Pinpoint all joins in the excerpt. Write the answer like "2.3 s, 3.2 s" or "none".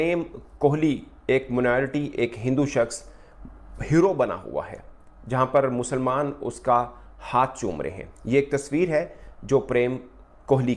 none